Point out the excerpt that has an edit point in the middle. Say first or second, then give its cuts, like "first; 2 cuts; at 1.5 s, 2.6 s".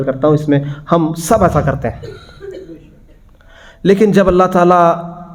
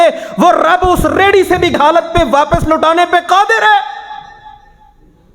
second; 1 cut; at 1.8 s